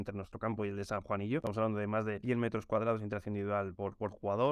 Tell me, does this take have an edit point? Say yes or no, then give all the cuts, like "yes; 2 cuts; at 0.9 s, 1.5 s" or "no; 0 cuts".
no; 0 cuts